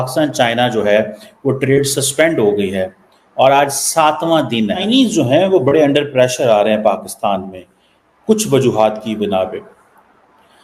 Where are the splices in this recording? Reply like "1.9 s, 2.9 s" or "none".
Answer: 4.8 s

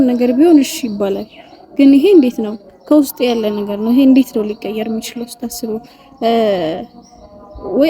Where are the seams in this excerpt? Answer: none

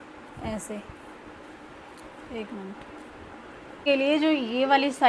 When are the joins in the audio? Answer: 3.8 s

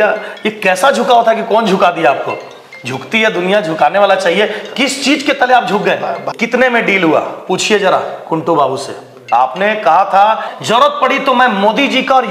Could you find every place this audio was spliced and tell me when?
6.2 s, 9.2 s, 10.5 s

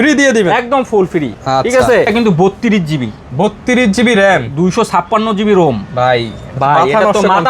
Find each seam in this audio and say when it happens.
2.1 s

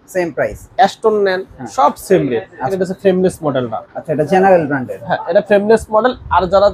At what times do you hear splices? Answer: 2.7 s

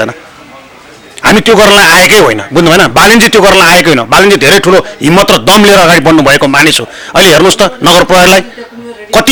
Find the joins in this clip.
none

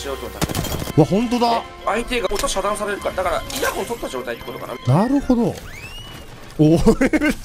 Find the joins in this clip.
0.9 s, 2.3 s, 3.5 s, 4.8 s

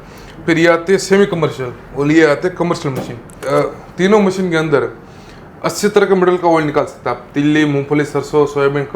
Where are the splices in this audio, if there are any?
3.4 s

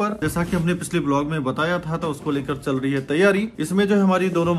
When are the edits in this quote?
3.6 s

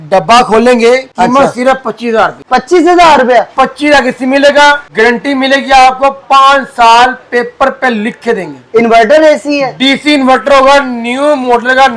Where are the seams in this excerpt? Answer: 1.1 s, 2.4 s, 4.9 s

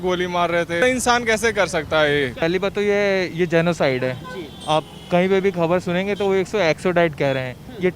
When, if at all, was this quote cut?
0.8 s, 2.3 s

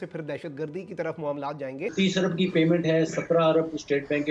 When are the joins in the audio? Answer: 1.8 s

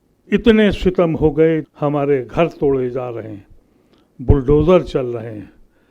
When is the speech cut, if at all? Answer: 1.7 s

